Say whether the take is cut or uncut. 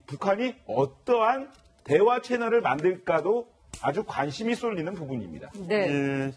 cut